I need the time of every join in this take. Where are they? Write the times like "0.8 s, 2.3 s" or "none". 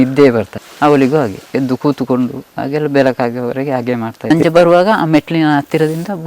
4.1 s